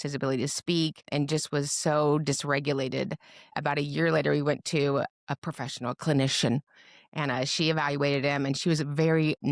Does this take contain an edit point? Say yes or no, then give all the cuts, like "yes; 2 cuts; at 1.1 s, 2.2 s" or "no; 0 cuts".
yes; 3 cuts; at 1.1 s, 3.6 s, 5.1 s